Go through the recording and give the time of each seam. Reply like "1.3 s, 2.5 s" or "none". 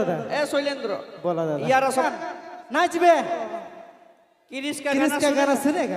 2.0 s